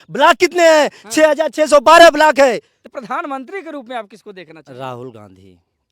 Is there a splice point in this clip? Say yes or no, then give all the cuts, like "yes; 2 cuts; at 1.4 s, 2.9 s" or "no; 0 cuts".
yes; 1 cut; at 2.7 s